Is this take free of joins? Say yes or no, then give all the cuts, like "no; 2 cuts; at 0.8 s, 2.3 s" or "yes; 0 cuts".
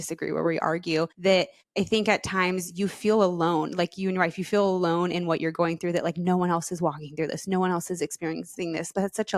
no; 1 cut; at 1.4 s